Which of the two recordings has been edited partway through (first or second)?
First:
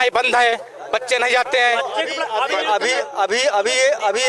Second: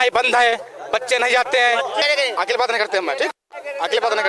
second